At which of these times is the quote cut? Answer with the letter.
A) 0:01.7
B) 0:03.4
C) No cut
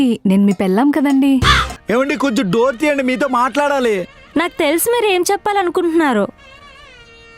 A